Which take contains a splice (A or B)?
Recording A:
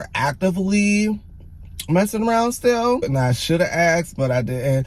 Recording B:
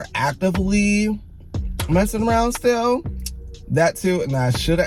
A